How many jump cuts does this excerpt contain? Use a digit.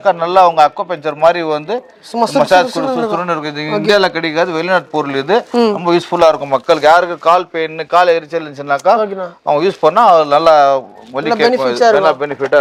0